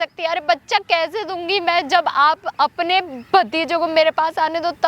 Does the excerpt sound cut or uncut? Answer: uncut